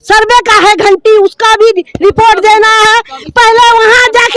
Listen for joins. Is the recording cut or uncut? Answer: uncut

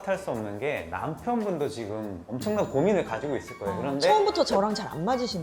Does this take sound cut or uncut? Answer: uncut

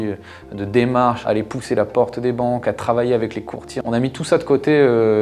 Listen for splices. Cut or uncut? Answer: cut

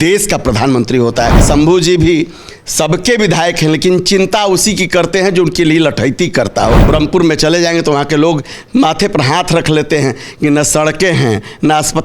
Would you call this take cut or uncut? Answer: cut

